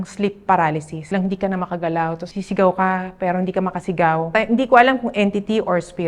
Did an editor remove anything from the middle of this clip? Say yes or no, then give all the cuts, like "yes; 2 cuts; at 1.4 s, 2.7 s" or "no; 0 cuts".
yes; 3 cuts; at 1.1 s, 2.3 s, 4.3 s